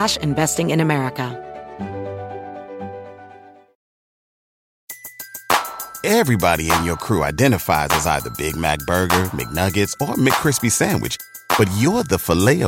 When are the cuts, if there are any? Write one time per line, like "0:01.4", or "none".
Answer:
0:01.3